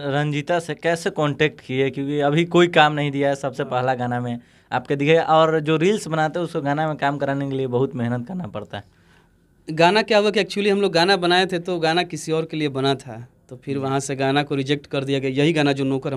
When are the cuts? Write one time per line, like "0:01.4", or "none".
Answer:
none